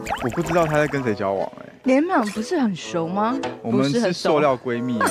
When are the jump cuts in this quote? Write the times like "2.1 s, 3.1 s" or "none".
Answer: none

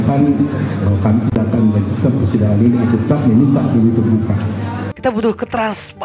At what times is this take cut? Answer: 4.9 s

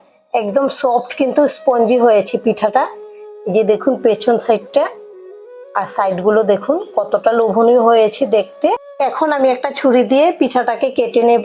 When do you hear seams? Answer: 8.9 s

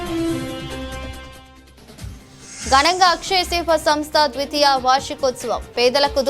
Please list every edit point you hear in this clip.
0.9 s, 2.6 s

